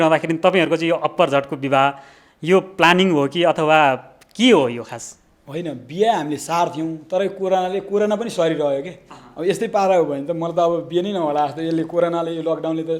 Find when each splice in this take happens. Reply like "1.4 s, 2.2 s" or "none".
none